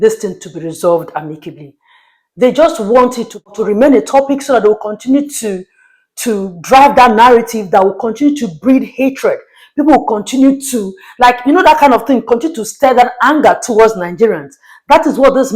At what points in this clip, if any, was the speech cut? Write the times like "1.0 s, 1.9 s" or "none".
3.5 s